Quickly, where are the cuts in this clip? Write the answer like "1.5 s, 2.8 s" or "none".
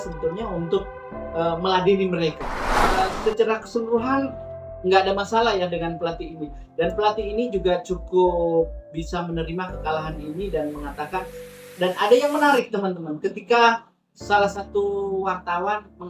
3.0 s